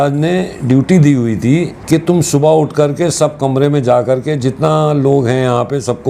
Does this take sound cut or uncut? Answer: cut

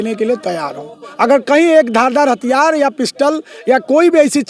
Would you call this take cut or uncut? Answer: uncut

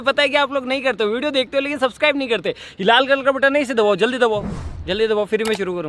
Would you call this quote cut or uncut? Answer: uncut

